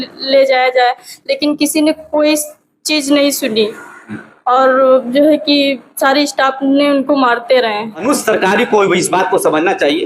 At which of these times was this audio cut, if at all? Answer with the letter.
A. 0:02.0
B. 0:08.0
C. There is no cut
B